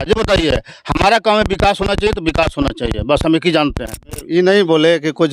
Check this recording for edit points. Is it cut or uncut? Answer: cut